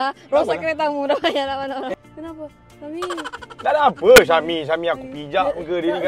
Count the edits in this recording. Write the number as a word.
one